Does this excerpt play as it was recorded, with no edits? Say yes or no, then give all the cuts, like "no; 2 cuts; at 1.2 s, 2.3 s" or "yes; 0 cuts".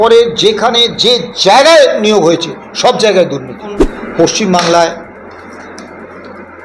no; 1 cut; at 4.0 s